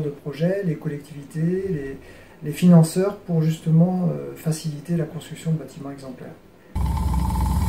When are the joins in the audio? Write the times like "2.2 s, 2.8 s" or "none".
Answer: 6.8 s